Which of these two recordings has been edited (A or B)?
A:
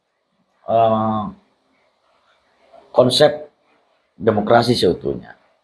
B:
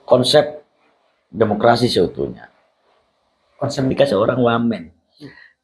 B